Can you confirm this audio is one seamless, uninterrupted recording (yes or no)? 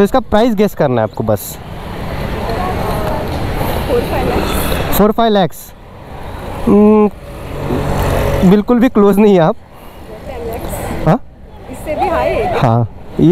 yes